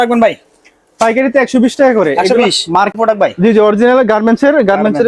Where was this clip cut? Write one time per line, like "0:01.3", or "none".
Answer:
0:02.9